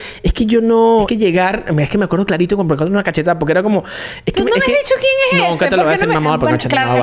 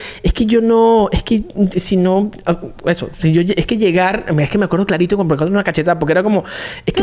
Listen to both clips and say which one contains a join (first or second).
first